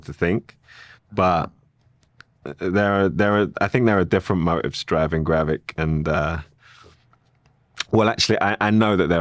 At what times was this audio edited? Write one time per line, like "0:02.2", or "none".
none